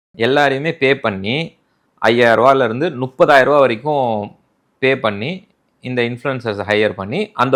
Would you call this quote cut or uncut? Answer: uncut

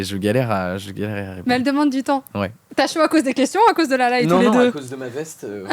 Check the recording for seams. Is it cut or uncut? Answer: cut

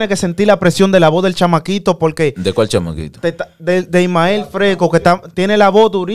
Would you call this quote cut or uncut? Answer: uncut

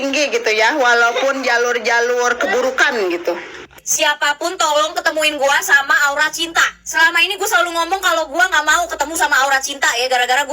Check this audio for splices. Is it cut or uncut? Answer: cut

